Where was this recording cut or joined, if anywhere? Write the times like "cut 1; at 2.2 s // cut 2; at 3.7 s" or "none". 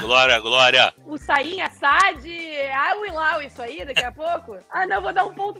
cut 1; at 1.0 s // cut 2; at 4.6 s